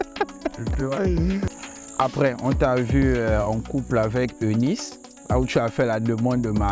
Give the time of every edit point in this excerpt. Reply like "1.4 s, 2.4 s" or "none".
1.5 s